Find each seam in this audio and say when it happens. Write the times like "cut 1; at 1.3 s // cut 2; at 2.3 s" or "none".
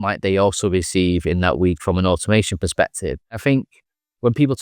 cut 1; at 3.4 s